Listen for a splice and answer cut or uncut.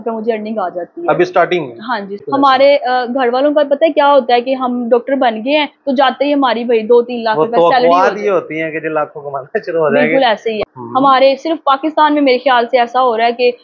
cut